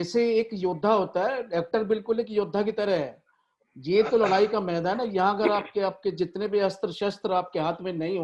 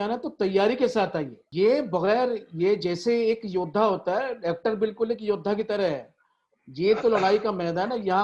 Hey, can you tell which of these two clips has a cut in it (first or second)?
second